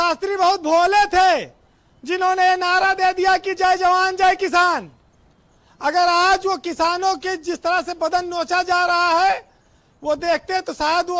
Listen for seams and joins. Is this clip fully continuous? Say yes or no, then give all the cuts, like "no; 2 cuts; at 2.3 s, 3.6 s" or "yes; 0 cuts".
yes; 0 cuts